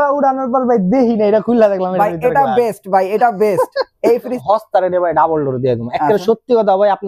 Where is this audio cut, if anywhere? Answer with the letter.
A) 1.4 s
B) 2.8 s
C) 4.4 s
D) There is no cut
C